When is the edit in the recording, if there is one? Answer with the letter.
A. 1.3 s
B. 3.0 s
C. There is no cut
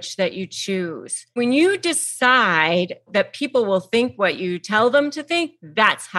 A